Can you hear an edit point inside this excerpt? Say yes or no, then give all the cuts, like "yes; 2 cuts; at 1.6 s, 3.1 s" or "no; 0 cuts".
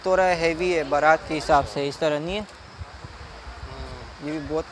no; 0 cuts